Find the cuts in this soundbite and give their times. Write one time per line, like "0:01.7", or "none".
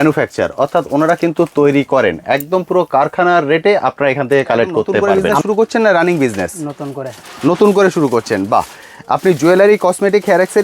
0:05.2